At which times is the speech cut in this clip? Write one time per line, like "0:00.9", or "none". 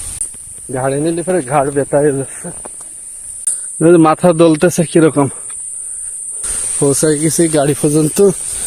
none